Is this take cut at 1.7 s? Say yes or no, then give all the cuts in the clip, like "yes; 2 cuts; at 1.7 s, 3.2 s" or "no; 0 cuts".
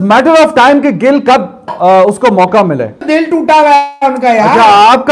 no; 1 cut; at 3.0 s